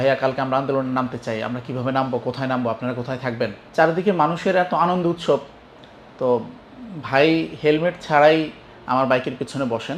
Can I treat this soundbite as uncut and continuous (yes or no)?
no